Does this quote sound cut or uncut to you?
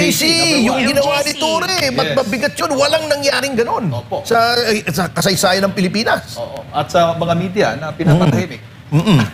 uncut